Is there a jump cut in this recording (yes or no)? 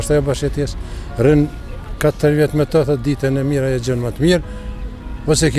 no